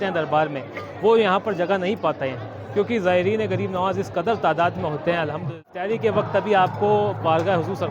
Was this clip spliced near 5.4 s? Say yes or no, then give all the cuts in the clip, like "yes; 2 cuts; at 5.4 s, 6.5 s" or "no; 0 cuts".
yes; 1 cut; at 5.4 s